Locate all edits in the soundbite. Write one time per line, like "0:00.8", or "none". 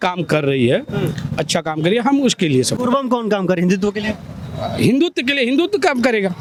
none